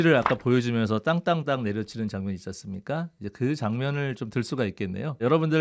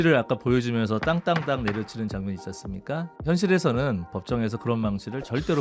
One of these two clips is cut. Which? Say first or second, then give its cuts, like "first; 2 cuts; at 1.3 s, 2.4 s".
second; 1 cut; at 3.2 s